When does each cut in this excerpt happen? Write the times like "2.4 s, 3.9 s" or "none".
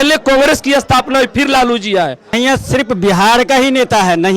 2.3 s